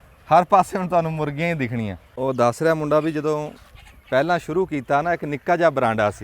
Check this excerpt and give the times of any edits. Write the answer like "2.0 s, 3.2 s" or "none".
2.0 s